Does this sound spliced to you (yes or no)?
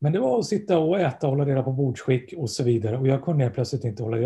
no